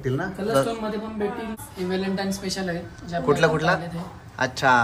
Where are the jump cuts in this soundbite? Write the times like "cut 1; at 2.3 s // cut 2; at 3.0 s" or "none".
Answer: cut 1; at 1.6 s

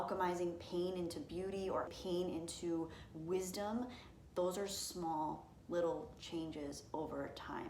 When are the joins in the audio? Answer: cut 1; at 1.9 s

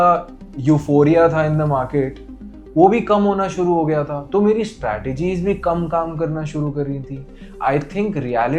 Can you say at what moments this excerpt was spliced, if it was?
none

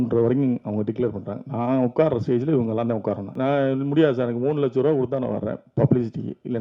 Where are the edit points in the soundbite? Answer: cut 1; at 3.3 s

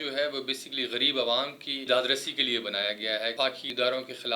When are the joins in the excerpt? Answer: cut 1; at 1.7 s // cut 2; at 3.4 s

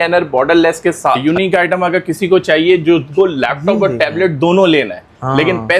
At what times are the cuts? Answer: cut 1; at 1.2 s

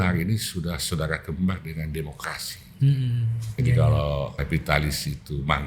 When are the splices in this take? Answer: cut 1; at 3.4 s // cut 2; at 4.3 s

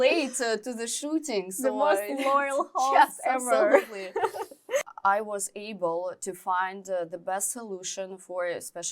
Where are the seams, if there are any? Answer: cut 1; at 4.8 s

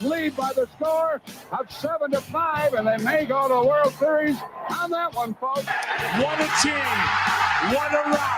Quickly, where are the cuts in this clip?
cut 1; at 6.0 s // cut 2; at 7.2 s

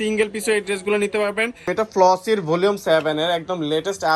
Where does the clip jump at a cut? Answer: cut 1; at 1.7 s

